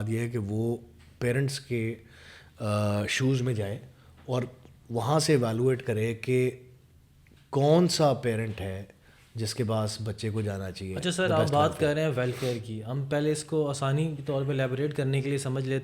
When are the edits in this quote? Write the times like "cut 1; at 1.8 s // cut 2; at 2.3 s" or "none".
none